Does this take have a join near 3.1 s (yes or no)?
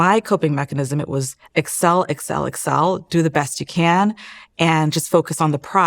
no